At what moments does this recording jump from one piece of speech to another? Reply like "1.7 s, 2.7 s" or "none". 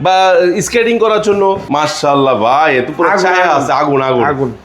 1.6 s